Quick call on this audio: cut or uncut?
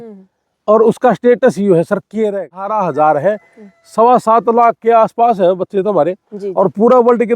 cut